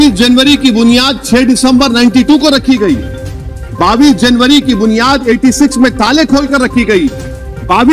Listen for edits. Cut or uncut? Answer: uncut